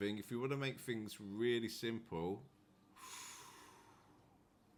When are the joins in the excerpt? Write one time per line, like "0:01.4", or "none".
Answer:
none